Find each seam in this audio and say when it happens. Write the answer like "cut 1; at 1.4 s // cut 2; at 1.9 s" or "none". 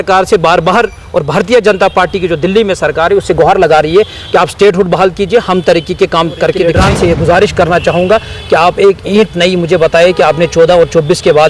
cut 1; at 6.7 s